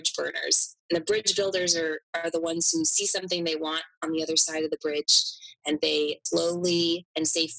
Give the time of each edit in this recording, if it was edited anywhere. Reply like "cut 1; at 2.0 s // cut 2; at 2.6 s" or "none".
cut 1; at 6.2 s